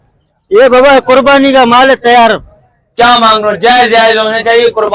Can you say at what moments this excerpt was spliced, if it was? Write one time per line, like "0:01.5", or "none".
none